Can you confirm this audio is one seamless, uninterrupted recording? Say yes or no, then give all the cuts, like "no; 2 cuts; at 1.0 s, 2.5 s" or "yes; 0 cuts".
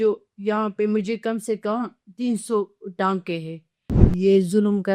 no; 1 cut; at 4.0 s